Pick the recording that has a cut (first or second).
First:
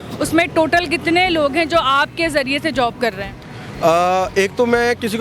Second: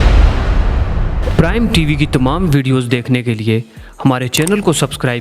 second